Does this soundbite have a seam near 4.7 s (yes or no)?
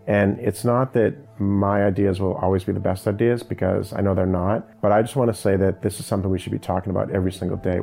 yes